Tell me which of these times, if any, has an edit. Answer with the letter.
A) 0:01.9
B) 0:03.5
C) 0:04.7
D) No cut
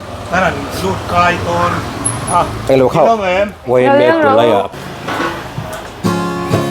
C